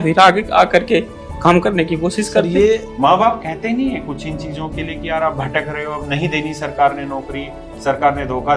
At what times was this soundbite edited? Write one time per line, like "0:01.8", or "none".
0:02.9